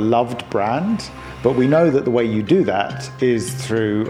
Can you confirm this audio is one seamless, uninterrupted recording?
yes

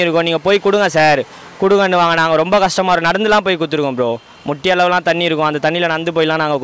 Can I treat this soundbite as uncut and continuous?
yes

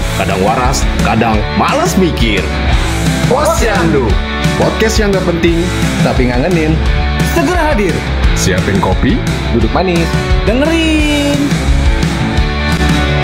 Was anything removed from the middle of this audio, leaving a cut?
no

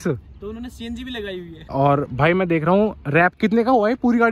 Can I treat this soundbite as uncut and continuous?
no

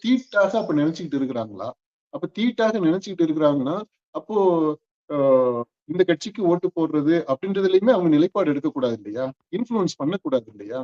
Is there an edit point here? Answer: no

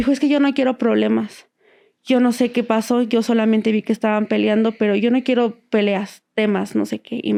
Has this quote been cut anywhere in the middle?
no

